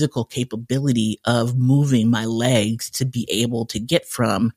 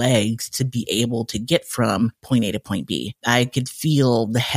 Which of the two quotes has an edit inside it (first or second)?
second